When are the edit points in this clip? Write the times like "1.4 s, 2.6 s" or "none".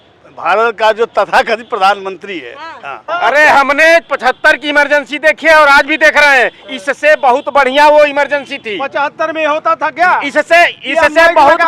3.1 s